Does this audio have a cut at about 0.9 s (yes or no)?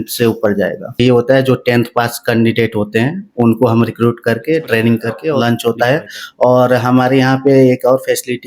yes